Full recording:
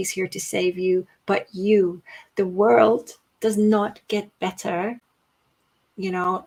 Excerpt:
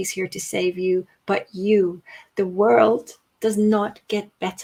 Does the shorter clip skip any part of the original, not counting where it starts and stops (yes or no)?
no